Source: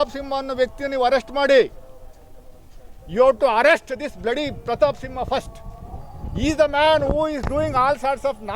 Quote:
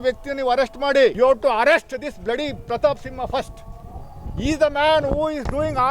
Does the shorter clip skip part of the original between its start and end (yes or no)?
yes